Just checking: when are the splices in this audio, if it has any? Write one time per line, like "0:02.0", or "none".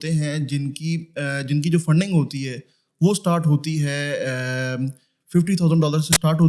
none